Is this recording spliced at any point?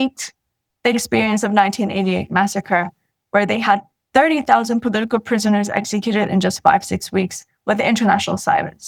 no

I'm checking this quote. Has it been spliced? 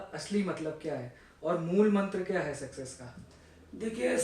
no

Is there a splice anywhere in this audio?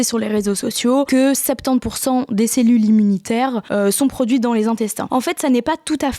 yes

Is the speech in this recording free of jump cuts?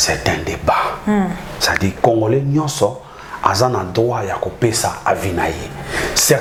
yes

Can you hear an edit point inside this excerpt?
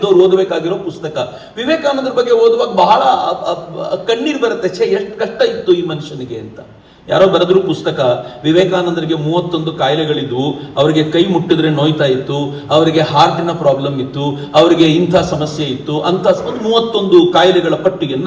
no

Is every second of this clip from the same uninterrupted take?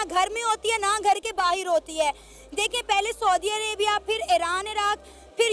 yes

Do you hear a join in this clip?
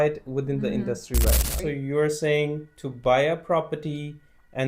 yes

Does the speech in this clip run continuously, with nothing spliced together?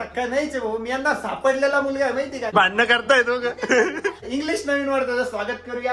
no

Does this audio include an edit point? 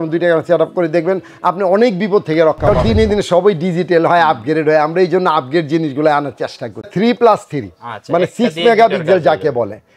yes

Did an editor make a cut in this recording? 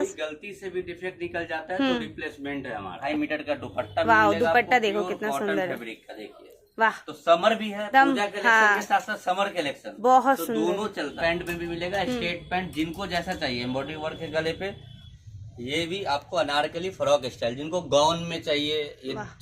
yes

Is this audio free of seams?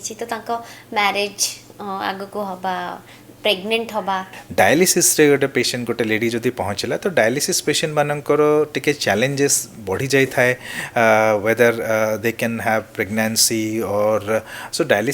no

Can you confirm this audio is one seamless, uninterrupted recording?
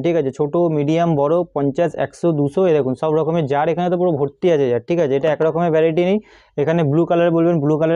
yes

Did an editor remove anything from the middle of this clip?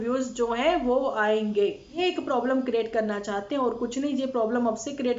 yes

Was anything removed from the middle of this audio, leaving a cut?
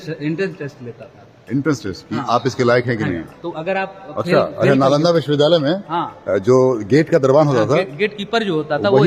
no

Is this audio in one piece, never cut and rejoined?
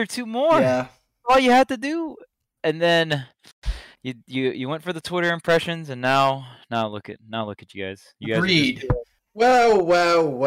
no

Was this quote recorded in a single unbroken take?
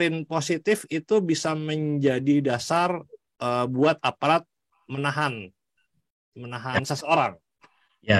yes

